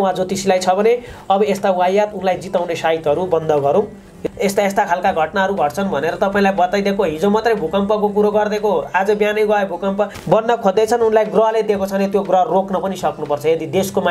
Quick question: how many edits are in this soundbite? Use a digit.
2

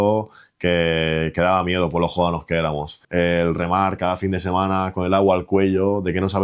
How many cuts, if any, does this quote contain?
1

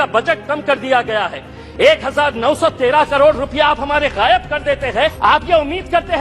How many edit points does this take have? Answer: 1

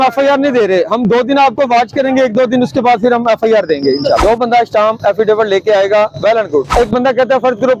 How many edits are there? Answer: 2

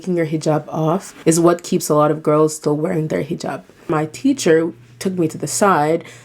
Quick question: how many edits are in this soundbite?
2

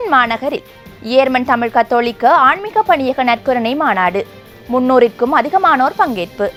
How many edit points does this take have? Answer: 0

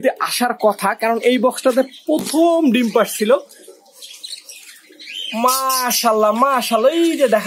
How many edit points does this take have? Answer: 0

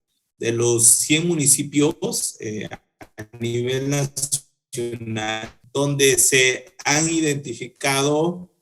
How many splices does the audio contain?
1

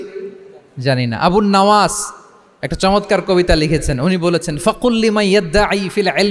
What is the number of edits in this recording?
0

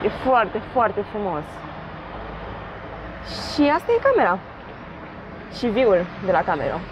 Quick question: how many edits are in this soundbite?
0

